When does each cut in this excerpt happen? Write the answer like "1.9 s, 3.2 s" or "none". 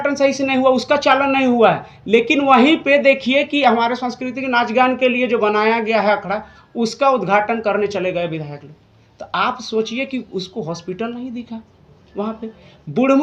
none